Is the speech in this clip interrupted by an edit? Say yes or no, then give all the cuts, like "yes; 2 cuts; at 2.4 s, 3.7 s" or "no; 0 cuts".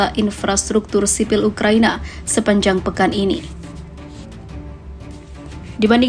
no; 0 cuts